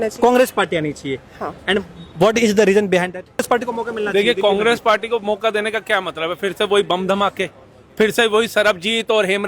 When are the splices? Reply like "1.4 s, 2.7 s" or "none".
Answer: 3.4 s